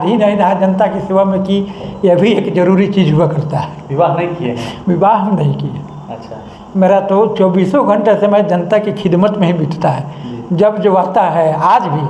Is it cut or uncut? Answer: uncut